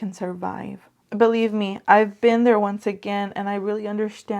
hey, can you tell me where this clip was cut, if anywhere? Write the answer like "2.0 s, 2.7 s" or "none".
0.9 s